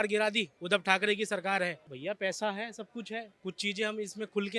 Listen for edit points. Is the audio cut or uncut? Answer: uncut